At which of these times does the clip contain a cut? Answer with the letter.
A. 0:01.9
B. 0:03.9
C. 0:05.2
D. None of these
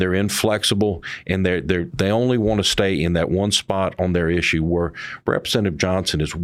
A